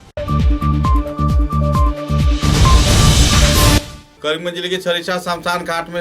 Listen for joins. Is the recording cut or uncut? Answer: cut